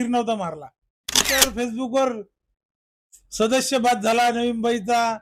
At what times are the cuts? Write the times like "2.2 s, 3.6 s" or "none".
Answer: 1.1 s